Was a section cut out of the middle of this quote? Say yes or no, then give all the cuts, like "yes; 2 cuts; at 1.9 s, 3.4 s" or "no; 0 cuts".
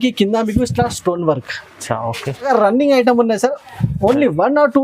yes; 1 cut; at 2.5 s